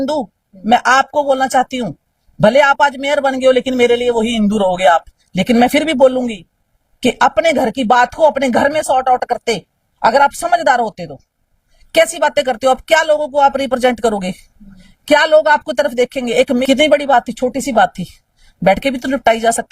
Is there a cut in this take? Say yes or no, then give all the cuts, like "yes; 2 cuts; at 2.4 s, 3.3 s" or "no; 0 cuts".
yes; 1 cut; at 16.6 s